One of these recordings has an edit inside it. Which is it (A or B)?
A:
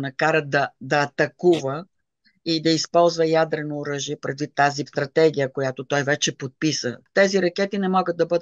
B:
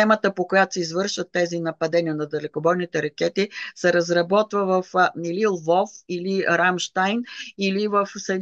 A